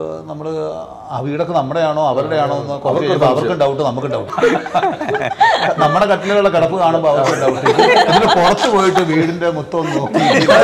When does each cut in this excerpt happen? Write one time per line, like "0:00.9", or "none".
0:04.2